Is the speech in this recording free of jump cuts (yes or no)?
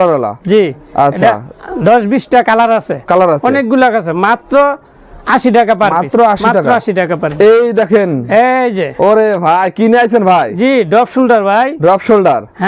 yes